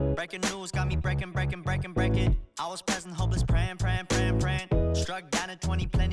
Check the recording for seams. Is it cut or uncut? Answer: uncut